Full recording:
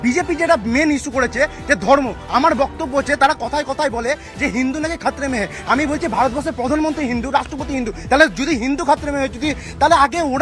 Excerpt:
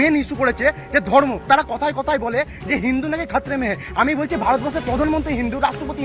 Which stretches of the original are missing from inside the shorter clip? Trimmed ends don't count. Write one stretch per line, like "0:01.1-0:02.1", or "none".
0:02.2-0:03.1